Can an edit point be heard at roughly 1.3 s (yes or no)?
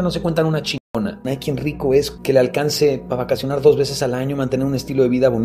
yes